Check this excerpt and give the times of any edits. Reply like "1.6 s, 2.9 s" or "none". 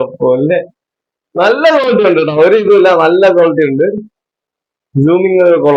none